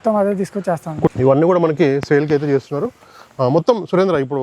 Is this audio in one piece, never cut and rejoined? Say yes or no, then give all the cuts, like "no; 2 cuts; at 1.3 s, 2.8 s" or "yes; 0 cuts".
no; 1 cut; at 1.1 s